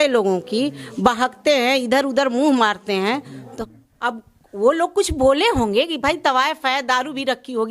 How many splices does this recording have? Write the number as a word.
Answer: one